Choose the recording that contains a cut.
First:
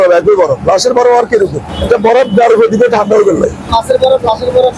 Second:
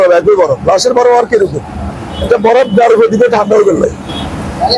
first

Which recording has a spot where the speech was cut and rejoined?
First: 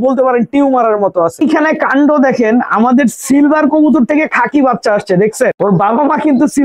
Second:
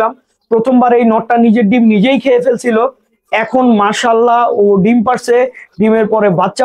first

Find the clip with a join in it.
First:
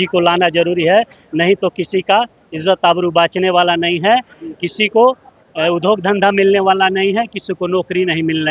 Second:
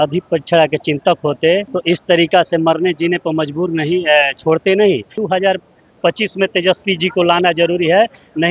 second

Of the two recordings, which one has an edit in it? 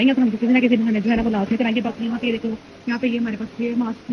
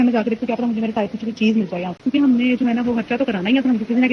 second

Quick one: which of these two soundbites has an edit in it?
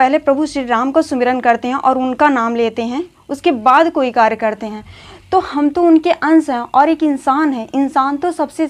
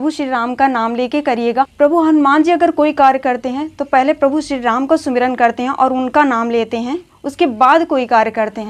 second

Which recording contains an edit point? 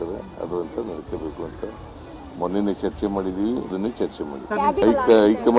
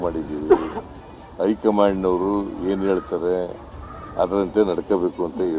first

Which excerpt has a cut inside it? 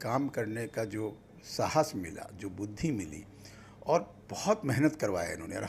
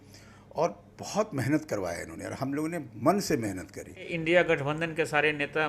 second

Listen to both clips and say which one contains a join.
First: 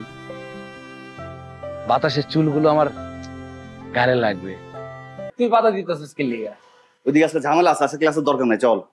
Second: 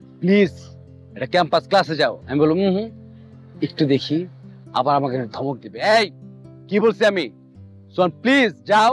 first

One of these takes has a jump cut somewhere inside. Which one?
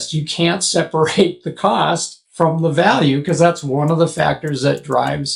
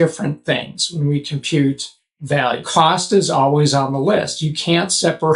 second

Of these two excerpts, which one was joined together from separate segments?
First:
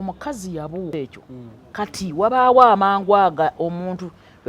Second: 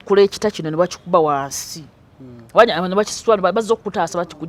first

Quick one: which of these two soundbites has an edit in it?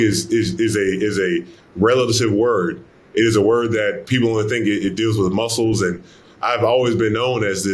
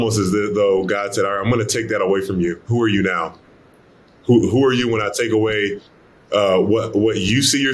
first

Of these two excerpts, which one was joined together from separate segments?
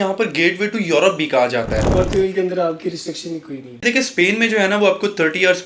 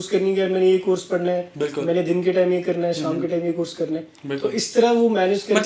first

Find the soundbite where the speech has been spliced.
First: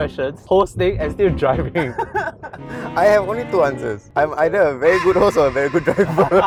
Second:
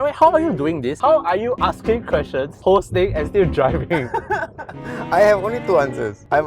second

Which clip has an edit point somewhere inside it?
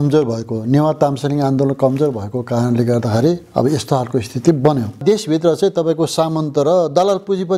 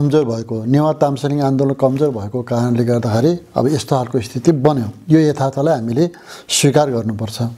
first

